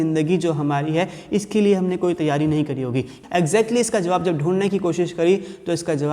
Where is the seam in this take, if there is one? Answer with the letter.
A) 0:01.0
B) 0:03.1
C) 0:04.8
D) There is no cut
B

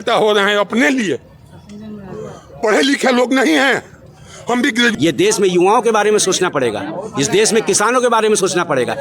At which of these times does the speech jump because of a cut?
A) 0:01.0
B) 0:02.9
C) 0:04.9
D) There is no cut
C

